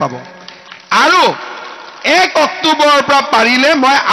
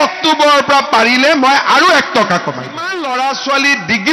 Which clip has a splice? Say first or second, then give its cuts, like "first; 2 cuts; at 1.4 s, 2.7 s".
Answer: second; 1 cut; at 2.9 s